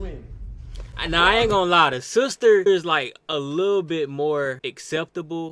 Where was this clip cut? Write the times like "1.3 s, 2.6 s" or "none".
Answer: 2.7 s, 4.6 s